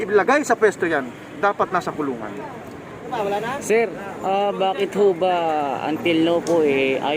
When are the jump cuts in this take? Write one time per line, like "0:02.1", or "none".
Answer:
0:03.1